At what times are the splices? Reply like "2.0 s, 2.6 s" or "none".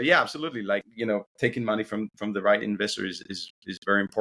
0.9 s